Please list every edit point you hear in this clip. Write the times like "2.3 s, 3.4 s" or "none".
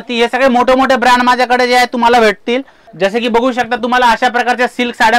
2.8 s

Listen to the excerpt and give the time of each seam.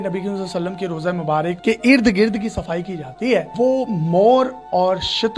1.6 s, 3.5 s

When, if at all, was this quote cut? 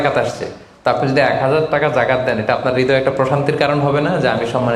none

